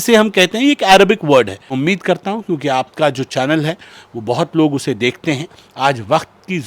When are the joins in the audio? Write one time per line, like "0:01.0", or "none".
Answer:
0:01.7